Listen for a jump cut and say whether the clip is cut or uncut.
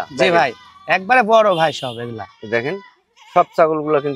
uncut